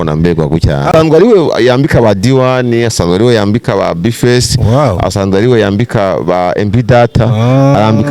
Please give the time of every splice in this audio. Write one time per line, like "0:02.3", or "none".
0:00.9